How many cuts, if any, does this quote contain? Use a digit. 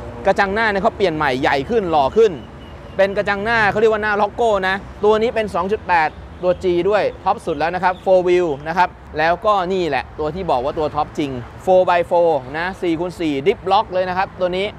2